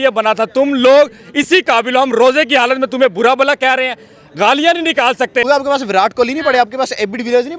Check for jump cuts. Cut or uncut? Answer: cut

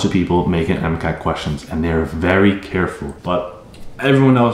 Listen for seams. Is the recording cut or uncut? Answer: cut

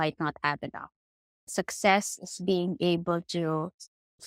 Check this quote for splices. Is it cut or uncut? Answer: uncut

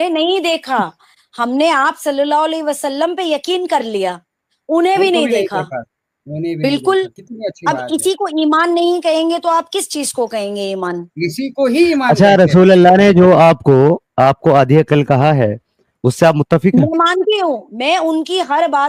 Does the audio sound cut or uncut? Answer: uncut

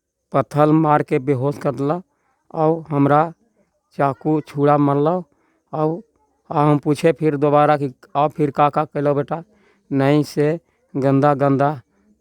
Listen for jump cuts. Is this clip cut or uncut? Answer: uncut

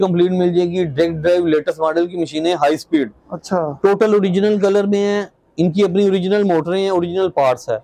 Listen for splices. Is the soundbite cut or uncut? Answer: uncut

